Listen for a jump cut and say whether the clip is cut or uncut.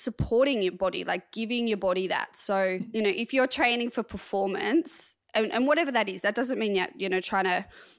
cut